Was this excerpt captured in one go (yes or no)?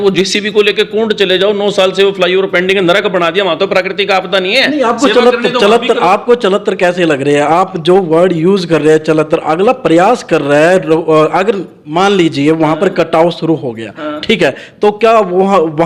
yes